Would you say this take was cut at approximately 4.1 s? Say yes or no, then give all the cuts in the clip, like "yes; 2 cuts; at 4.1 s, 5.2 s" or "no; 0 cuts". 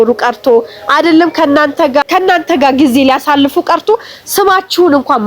no; 1 cut; at 2.0 s